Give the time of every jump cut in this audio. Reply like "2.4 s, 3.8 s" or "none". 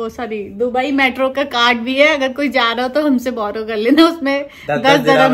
none